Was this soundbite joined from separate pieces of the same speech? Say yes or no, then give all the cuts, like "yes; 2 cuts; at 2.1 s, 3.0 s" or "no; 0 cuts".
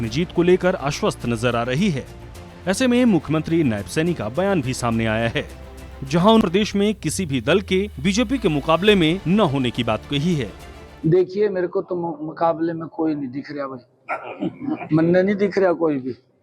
yes; 1 cut; at 6.4 s